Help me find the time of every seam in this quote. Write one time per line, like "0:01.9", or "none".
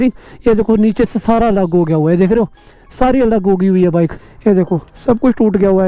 0:04.2